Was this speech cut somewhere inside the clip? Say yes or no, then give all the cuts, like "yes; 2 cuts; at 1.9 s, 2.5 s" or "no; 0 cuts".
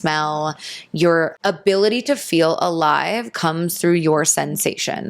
yes; 1 cut; at 1.4 s